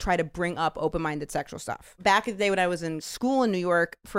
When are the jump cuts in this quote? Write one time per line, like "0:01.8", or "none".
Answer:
0:01.9
0:03.0